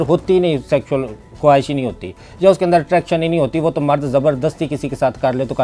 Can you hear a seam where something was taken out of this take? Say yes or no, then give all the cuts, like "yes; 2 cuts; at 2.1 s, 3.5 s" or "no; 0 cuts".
no; 0 cuts